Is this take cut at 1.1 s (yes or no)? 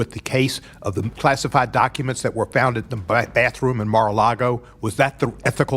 yes